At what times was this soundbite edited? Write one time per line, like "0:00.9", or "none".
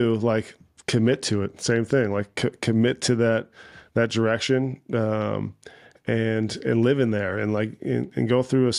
none